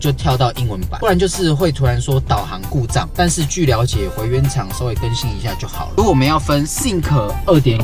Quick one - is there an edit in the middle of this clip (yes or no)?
yes